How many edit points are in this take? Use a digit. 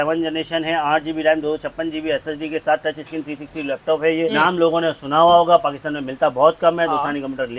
1